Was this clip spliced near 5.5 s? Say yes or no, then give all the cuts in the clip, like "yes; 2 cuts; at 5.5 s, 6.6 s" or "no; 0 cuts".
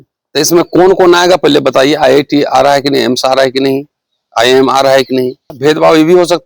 yes; 1 cut; at 5.5 s